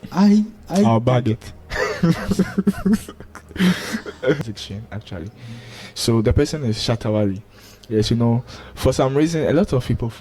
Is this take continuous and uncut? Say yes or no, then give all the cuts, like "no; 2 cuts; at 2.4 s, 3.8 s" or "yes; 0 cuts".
no; 1 cut; at 4.4 s